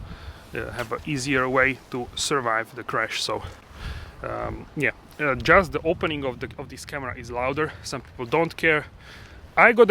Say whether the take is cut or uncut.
uncut